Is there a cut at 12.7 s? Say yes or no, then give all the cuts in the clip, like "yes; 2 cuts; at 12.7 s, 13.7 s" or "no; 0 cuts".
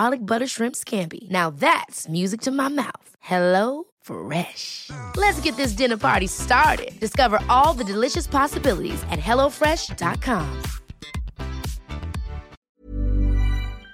yes; 1 cut; at 12.7 s